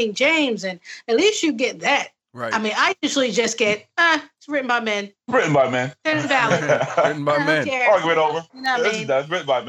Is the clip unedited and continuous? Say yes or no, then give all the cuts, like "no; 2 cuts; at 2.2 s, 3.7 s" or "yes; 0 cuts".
yes; 0 cuts